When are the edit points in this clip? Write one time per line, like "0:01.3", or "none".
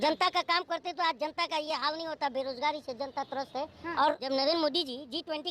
0:04.2